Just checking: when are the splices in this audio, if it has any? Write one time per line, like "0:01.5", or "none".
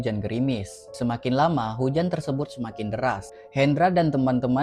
0:03.4